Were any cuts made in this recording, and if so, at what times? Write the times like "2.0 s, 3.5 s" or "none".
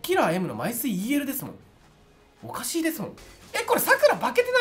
3.2 s